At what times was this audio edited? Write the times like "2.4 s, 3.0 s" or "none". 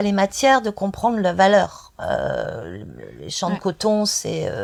none